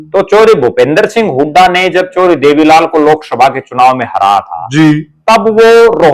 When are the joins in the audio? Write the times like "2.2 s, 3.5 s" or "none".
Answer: none